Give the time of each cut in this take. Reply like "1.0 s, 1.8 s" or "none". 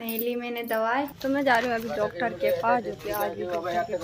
1.1 s

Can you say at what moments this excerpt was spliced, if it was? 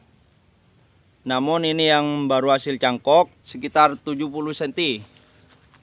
3.5 s

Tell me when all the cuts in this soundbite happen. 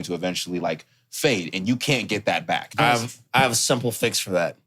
2.7 s

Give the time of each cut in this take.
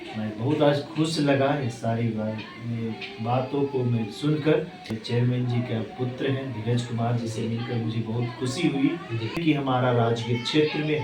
5.0 s, 9.4 s

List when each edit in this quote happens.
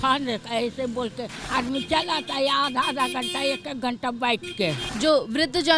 1.4 s, 4.9 s

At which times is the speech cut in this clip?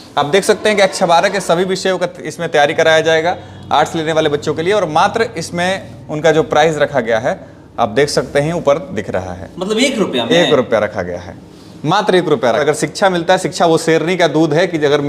12.6 s

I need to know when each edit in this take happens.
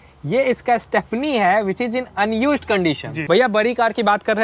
3.1 s

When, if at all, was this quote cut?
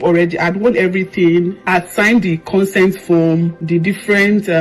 1.6 s

